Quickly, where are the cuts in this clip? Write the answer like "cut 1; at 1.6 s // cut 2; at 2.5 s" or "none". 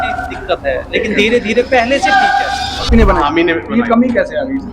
cut 1; at 2.9 s